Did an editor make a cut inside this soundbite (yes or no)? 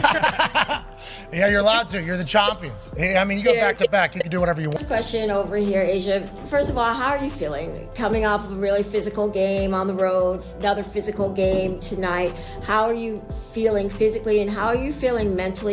yes